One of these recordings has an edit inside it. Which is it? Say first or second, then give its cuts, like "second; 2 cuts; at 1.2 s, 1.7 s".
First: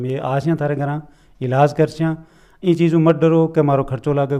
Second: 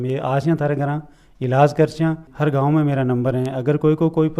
second; 1 cut; at 2.3 s